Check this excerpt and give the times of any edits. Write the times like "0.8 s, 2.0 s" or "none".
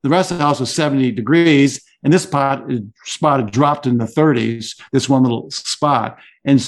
none